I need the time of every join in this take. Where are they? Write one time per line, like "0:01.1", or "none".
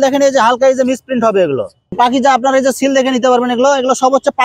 0:02.0